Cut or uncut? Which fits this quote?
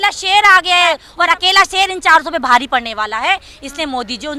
cut